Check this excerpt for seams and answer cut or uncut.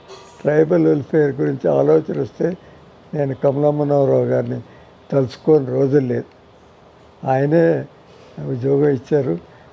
uncut